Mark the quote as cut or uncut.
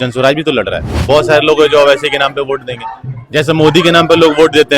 cut